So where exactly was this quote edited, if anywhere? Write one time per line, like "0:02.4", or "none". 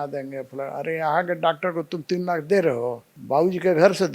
0:03.1

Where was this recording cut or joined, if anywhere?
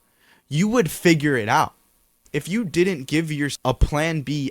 0:02.2
0:03.5

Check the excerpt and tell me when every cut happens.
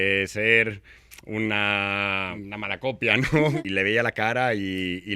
0:02.4
0:03.6

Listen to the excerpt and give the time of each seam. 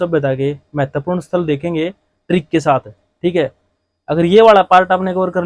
none

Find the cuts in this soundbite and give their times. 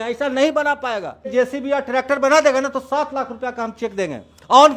0:01.3

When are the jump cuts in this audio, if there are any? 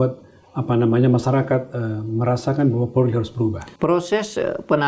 0:03.7

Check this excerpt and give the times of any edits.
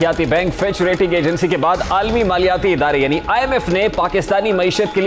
none

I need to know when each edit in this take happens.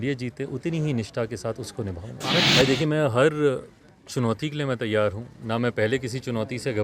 0:02.5

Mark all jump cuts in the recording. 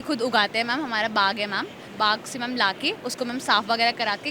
0:01.9

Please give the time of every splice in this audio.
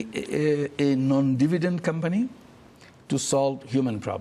none

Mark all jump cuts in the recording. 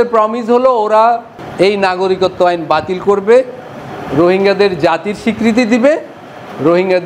none

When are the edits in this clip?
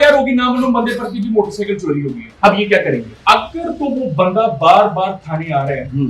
0:02.2
0:03.1

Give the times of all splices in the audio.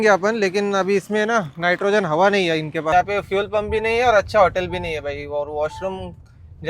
0:02.9

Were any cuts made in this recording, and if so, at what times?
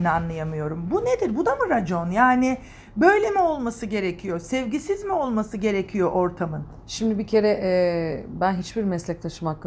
none

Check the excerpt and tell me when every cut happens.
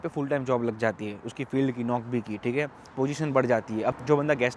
none

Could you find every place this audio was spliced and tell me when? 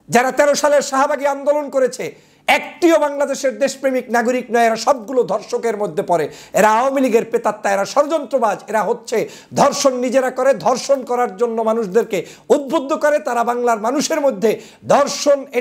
none

